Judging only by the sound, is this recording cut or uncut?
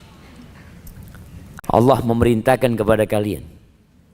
cut